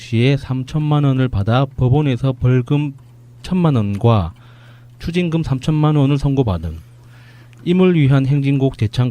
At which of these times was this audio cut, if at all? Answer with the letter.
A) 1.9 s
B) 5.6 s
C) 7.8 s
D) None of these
B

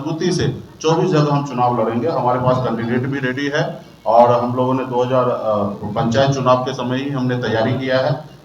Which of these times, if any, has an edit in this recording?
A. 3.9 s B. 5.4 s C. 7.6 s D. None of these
D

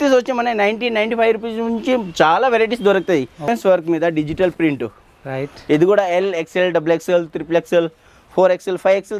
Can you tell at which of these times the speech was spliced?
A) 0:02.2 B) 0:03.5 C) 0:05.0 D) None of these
B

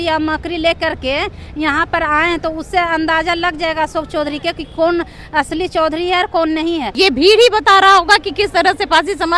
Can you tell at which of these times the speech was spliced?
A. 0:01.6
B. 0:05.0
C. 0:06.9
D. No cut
C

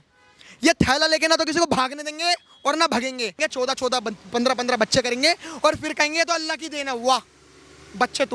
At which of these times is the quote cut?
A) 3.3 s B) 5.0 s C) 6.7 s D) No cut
A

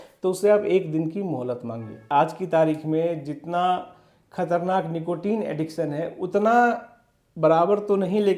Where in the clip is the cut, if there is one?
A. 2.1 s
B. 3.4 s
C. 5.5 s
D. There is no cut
A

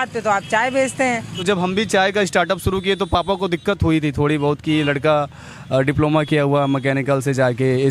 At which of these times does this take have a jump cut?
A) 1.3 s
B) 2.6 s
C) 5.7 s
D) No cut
A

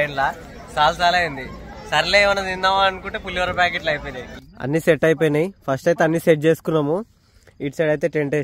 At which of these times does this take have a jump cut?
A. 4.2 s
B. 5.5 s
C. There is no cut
A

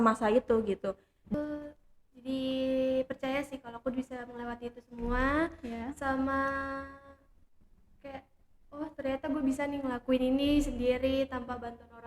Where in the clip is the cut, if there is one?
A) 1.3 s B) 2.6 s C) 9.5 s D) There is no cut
A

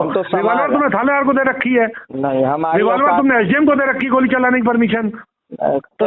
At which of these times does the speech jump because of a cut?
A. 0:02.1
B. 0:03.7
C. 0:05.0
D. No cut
D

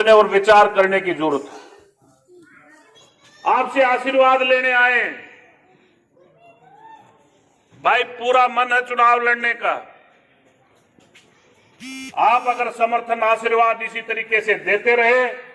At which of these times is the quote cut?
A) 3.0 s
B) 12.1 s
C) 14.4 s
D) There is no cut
A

